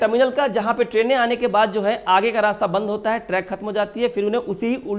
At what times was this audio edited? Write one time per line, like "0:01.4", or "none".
none

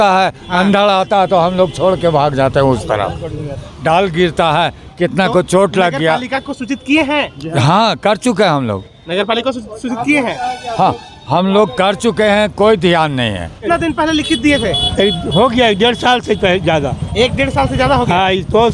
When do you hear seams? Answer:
0:03.7
0:13.6

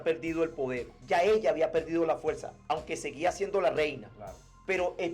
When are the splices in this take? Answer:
0:00.9

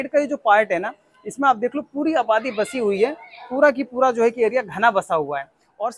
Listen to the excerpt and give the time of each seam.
none

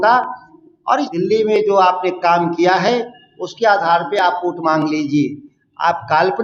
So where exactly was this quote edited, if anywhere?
0:01.1

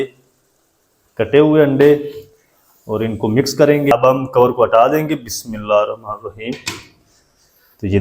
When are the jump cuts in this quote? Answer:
0:03.9

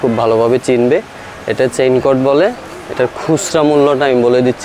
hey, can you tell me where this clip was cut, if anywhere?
none

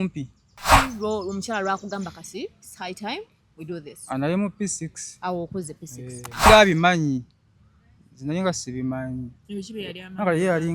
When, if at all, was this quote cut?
0:00.7
0:06.5

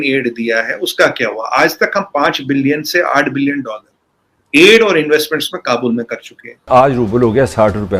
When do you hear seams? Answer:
0:06.7

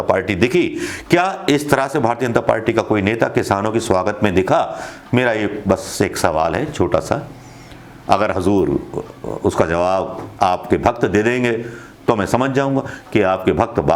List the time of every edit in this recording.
none

